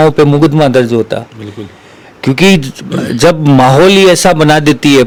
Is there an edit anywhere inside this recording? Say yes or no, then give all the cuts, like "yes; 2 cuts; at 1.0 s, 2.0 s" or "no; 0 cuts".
no; 0 cuts